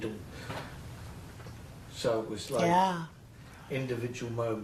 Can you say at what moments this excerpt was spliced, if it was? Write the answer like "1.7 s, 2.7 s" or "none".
none